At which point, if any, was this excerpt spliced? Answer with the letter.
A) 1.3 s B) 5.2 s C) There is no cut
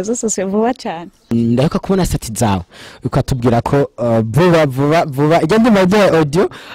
A